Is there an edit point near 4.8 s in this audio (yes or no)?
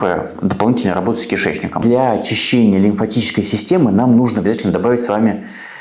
no